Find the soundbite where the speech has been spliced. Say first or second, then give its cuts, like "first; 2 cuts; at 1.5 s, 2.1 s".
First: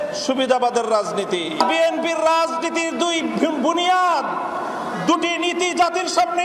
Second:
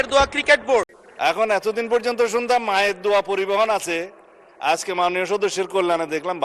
second; 1 cut; at 1.0 s